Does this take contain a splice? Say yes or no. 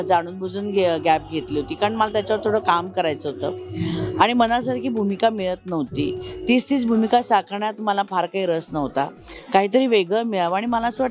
no